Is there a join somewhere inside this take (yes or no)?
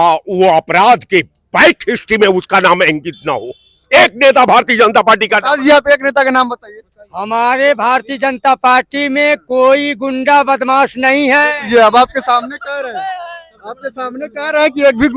no